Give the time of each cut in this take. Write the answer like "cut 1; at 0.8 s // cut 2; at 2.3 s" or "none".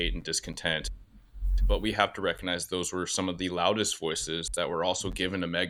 none